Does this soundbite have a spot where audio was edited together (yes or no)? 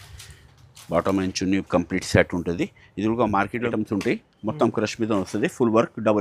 yes